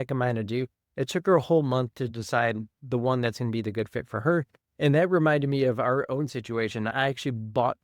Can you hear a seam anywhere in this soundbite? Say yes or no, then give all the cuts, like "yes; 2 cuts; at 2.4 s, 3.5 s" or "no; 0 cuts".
yes; 1 cut; at 6.9 s